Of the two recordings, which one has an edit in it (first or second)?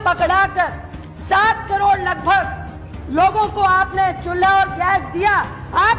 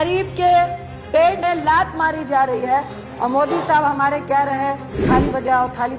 second